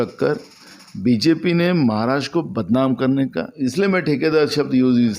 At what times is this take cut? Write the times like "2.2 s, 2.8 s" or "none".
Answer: 3.5 s